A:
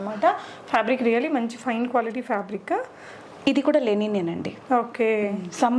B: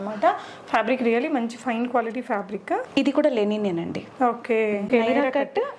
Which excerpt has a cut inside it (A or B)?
B